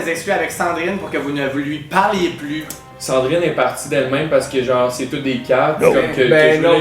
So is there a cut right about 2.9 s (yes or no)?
yes